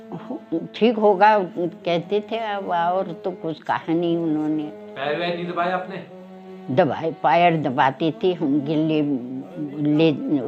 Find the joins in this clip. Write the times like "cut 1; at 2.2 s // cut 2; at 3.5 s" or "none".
none